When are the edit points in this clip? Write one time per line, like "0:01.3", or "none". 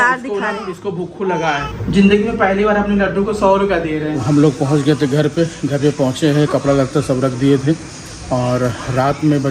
0:01.7
0:04.2